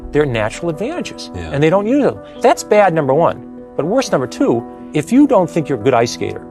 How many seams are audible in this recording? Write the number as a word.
two